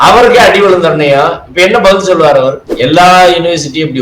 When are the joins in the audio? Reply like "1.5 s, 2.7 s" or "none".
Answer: 2.7 s